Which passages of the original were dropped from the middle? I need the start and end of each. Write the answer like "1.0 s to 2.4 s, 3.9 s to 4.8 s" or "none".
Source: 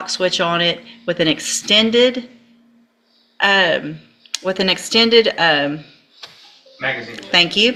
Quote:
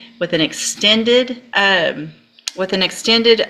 2.3 s to 3.3 s